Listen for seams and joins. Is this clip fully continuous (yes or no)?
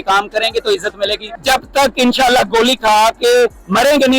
no